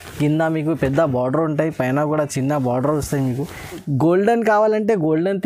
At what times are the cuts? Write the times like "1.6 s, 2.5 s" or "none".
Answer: 3.8 s